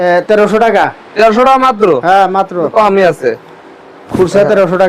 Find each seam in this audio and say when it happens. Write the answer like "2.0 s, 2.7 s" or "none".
none